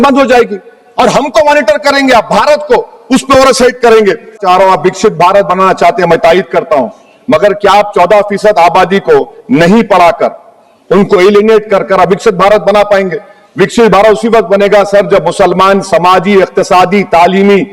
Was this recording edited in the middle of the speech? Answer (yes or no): yes